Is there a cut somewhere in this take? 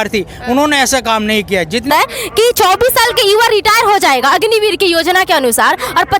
yes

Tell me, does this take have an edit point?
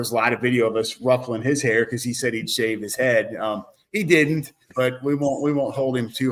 no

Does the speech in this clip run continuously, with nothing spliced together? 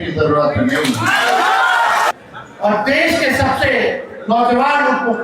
no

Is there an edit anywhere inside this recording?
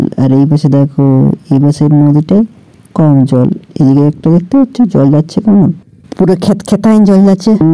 no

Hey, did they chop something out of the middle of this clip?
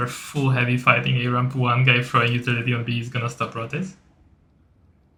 no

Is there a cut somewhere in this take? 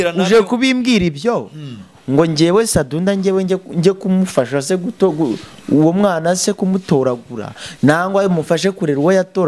no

